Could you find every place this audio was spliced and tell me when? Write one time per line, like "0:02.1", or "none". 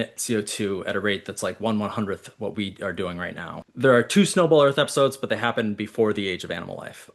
0:03.6